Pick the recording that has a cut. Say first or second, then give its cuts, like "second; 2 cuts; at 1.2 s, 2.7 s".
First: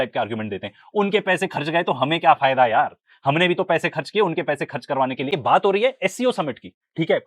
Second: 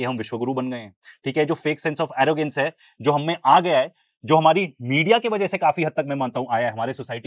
first; 1 cut; at 5.3 s